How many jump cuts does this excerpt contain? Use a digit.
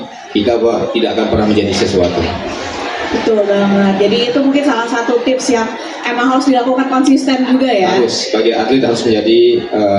0